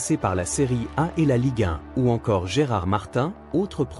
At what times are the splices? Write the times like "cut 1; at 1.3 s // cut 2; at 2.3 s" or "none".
cut 1; at 1.8 s